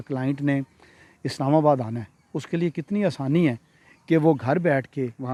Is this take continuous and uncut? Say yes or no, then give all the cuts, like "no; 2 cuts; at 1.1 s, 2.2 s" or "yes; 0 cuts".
yes; 0 cuts